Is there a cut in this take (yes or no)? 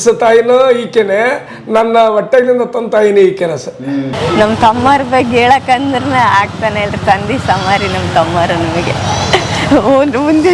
yes